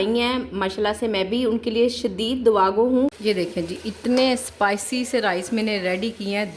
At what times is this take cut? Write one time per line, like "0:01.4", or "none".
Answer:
0:03.2